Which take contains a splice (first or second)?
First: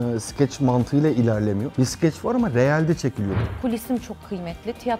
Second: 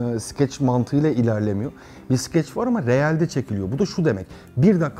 first